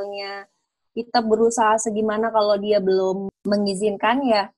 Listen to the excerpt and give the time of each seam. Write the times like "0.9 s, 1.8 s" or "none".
3.3 s